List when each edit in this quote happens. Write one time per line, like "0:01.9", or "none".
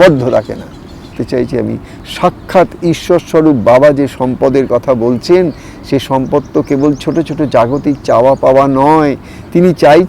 0:01.2